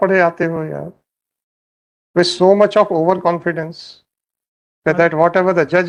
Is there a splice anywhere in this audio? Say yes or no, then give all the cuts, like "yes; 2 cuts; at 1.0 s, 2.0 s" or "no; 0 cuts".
no; 0 cuts